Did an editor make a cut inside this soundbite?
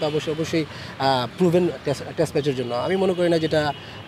no; 0 cuts

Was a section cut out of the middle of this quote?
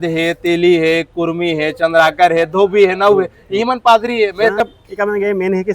yes; 1 cut; at 4.6 s

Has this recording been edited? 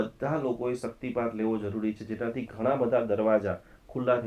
no; 0 cuts

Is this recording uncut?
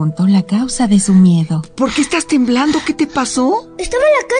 yes; 0 cuts

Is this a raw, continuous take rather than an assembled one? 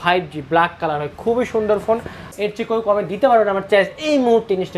no; 1 cut; at 2.3 s

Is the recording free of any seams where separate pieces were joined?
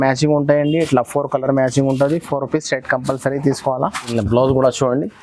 no; 1 cut; at 4.1 s

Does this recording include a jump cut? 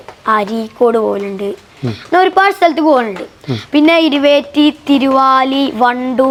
no; 0 cuts

